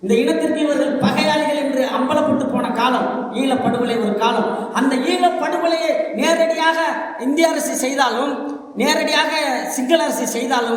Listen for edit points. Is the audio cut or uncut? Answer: uncut